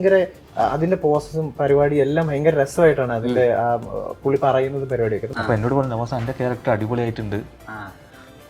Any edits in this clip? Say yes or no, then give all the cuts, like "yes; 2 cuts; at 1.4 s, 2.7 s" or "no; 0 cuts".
yes; 1 cut; at 5.3 s